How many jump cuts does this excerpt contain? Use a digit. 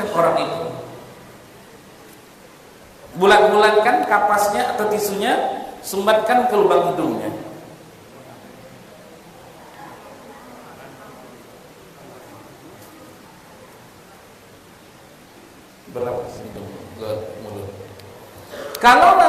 0